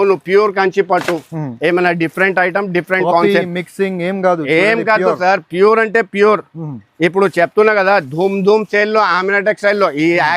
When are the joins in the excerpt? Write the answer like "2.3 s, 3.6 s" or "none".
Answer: none